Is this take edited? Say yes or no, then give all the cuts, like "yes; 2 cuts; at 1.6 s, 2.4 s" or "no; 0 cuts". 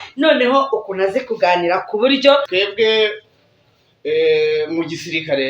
yes; 1 cut; at 2.5 s